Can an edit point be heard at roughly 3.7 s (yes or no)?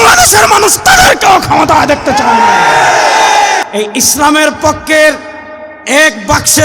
yes